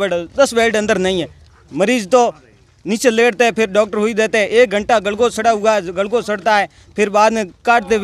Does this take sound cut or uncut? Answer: uncut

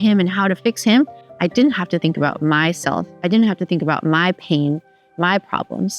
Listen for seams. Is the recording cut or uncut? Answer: uncut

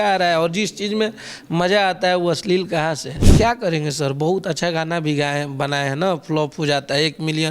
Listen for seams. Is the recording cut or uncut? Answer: cut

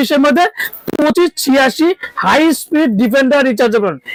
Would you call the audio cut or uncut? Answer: uncut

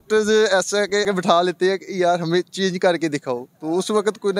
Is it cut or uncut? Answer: cut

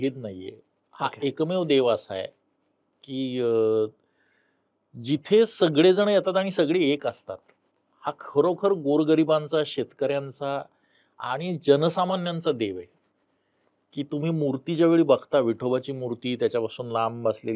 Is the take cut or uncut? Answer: uncut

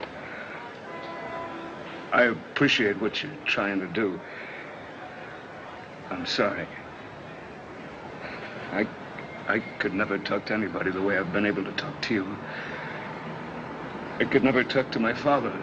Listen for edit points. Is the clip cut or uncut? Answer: uncut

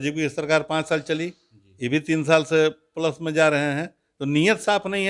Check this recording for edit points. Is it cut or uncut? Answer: uncut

